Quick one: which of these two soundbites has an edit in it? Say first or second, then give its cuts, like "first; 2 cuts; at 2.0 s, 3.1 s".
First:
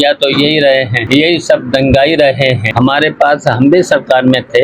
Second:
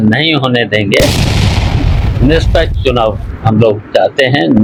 first; 2 cuts; at 1.0 s, 2.7 s